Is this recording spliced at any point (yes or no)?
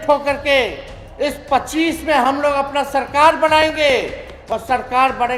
no